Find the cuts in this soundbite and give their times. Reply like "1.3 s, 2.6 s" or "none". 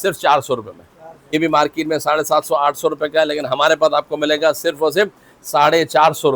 1.1 s

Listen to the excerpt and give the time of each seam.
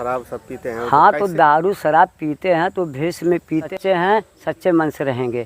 3.7 s

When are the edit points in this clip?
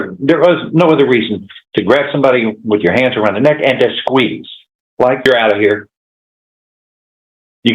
5.3 s

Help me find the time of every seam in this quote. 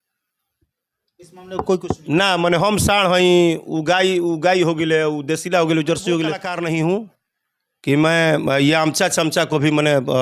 6.5 s

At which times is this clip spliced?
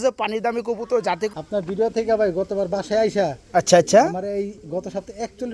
1.3 s

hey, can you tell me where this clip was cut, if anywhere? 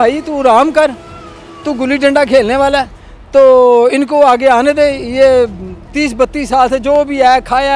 none

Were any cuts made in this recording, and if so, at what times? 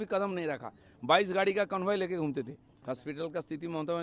2.7 s

